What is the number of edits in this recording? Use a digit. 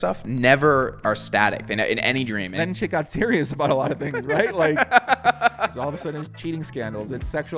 2